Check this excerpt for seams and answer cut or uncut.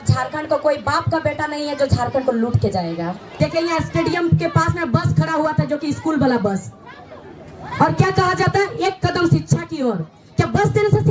cut